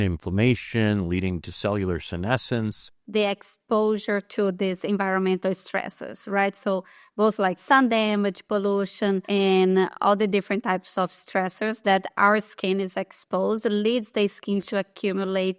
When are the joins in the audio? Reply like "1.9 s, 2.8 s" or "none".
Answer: 3.0 s

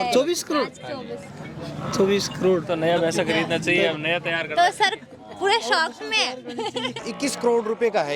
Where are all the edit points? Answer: 7.0 s

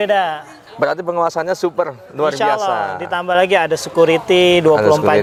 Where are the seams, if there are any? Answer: none

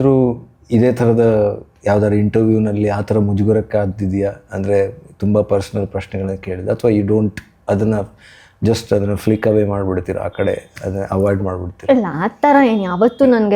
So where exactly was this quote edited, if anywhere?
none

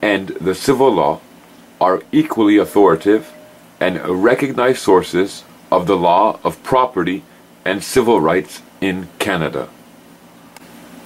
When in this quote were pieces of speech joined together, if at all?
none

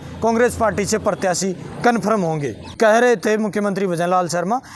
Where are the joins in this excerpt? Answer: 2.6 s

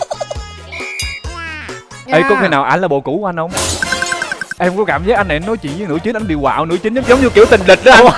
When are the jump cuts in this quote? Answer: 2.0 s, 4.4 s

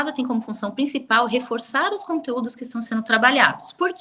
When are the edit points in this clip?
none

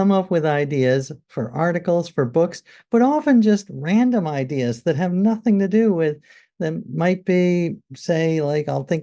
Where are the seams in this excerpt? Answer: none

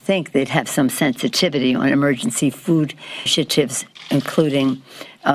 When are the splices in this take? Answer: 3.3 s

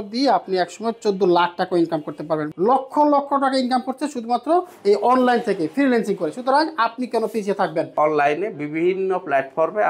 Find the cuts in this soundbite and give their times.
2.5 s, 7.9 s

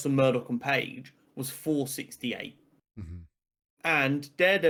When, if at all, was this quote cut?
none

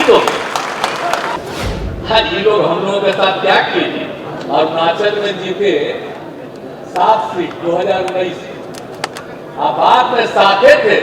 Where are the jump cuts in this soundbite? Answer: 1.4 s

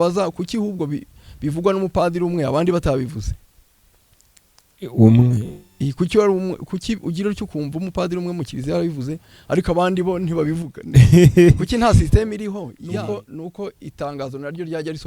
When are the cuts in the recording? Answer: 12.7 s

